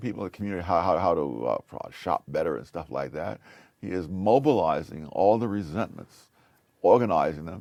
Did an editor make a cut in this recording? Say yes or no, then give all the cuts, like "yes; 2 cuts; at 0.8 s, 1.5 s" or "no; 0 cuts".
no; 0 cuts